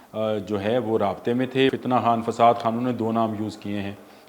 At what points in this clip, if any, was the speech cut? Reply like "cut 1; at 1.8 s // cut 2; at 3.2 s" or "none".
cut 1; at 1.7 s